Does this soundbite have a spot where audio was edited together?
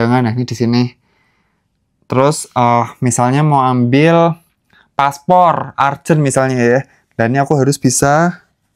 no; 0 cuts

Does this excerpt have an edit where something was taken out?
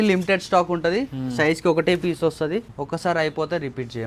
no; 0 cuts

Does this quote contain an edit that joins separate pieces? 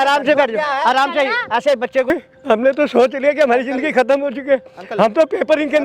yes; 1 cut; at 2.1 s

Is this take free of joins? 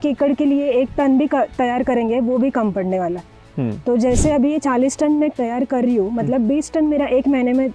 no; 1 cut; at 5.4 s

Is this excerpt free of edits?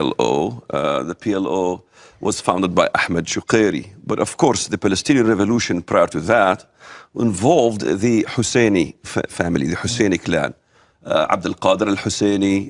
no; 1 cut; at 6.5 s

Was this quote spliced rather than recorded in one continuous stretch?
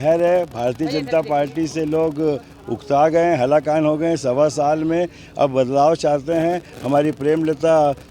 no; 0 cuts

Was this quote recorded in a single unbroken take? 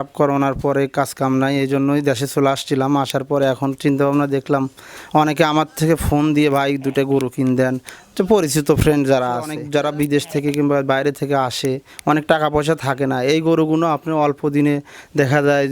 no; 1 cut; at 9.6 s

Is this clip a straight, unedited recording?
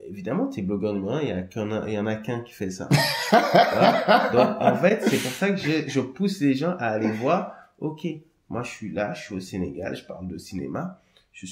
yes; 0 cuts

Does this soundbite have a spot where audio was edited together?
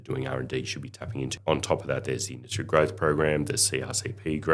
yes; 1 cut; at 1.3 s

